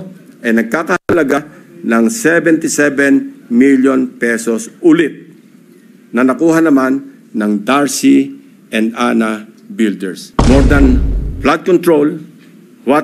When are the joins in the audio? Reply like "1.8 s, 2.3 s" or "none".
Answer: 10.3 s